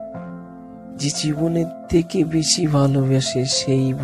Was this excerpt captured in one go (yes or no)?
no